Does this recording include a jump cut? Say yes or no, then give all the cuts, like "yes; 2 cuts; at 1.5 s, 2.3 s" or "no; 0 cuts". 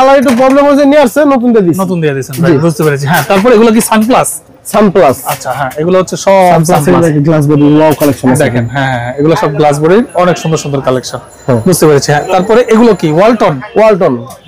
no; 0 cuts